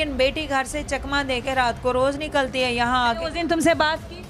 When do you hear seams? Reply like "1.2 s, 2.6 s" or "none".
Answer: 3.1 s